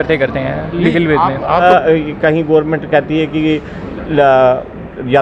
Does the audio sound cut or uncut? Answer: cut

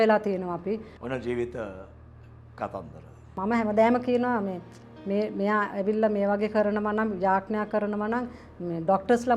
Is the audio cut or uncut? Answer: cut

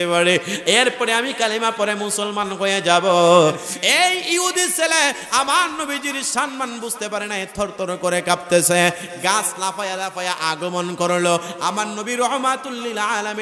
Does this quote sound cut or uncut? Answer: cut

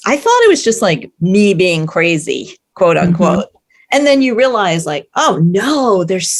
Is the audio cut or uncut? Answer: uncut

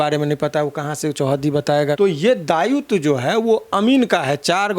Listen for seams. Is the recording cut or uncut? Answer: cut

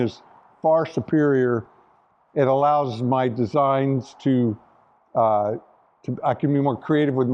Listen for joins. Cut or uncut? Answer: uncut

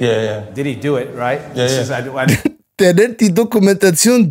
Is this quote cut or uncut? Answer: uncut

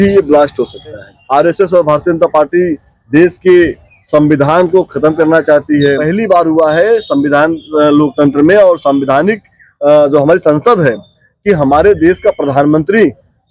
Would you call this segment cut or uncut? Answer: cut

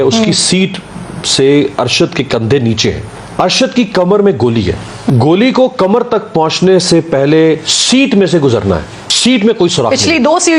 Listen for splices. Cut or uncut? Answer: cut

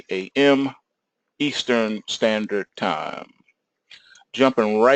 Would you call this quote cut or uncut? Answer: cut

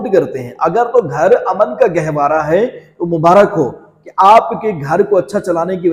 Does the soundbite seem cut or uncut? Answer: uncut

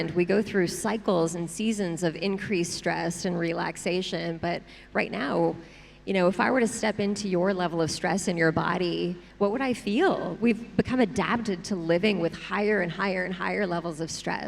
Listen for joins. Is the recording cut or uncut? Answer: uncut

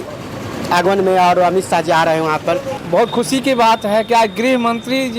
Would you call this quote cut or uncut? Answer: cut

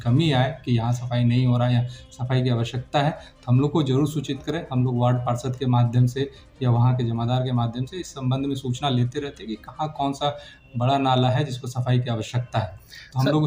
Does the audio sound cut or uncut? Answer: uncut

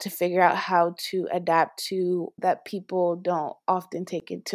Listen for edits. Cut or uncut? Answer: cut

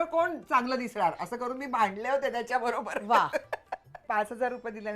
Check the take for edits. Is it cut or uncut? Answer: cut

